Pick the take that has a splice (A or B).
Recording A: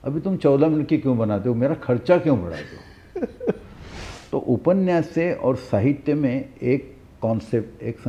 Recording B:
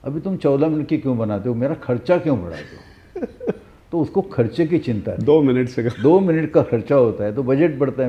A